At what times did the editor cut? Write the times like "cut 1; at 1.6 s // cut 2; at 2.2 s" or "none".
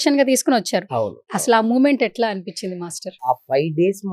cut 1; at 3.2 s